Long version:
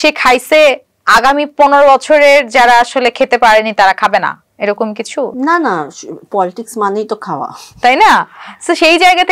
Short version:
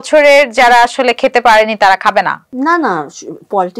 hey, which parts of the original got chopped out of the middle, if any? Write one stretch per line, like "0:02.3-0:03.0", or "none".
0:04.5-0:05.3

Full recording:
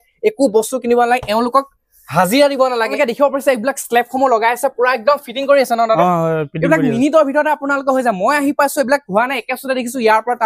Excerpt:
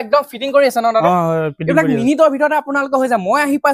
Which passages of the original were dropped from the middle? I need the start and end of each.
none

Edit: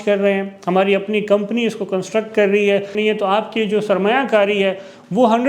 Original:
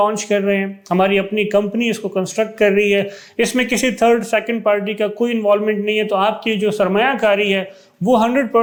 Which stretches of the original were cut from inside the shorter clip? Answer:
0:03.2-0:05.8

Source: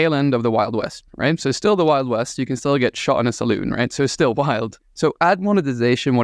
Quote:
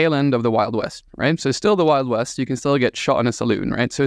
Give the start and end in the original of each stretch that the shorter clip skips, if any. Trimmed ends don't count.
none

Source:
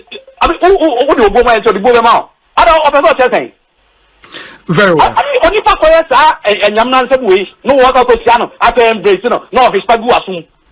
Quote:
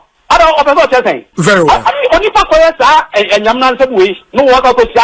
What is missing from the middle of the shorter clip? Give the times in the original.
0:03.5-0:04.6

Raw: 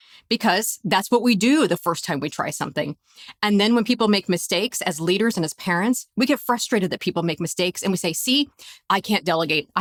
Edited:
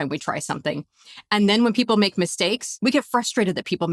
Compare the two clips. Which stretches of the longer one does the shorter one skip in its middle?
0:04.8-0:06.0

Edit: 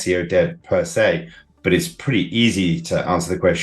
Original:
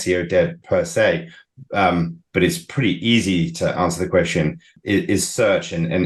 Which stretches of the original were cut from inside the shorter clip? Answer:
0:01.5-0:02.2

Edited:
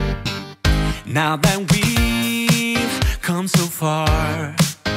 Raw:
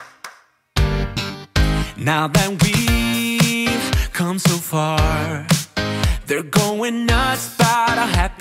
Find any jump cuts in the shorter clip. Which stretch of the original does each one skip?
none

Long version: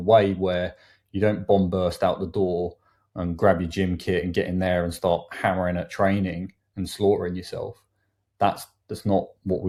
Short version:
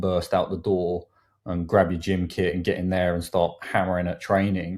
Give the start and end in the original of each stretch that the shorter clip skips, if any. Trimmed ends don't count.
none

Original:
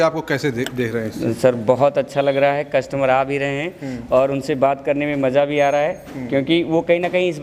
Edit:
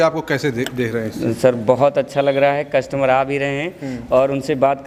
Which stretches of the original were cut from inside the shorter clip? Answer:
none

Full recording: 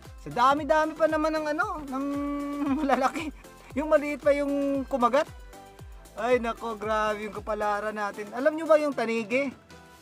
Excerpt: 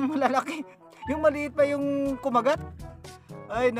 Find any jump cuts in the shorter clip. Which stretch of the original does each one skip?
none

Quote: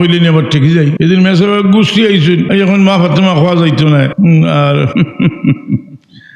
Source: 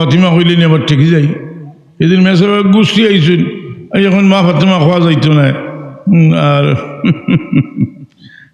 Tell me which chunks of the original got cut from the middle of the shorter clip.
0:01.3-0:01.9
0:03.5-0:03.9
0:05.6-0:06.0
0:06.8-0:07.0

